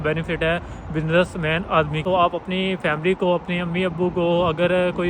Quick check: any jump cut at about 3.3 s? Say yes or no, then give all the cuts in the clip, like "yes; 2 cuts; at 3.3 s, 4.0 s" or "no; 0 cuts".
no; 1 cut; at 1.9 s